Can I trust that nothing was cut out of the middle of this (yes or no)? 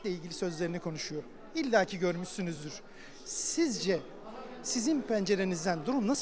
yes